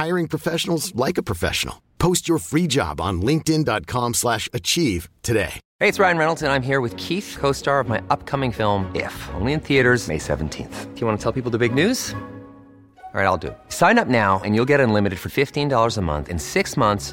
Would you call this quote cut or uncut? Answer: cut